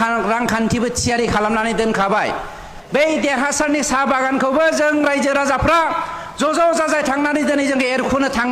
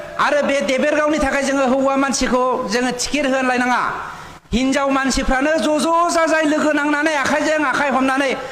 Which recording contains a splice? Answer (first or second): first